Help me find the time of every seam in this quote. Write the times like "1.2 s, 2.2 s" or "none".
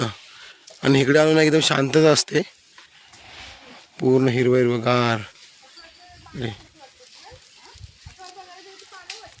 none